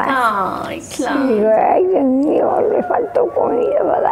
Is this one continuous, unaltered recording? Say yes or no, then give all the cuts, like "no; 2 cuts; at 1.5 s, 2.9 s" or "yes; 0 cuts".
yes; 0 cuts